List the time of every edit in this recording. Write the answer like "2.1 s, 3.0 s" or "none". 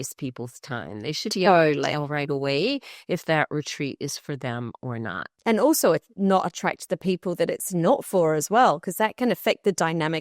5.3 s